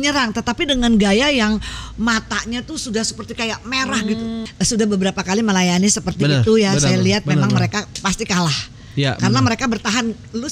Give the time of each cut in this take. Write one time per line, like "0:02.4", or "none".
0:04.4